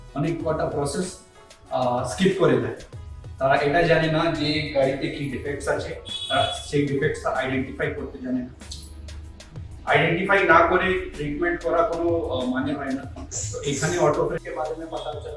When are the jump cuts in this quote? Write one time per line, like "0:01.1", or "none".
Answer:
0:14.4